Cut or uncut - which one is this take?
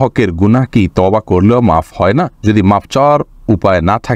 uncut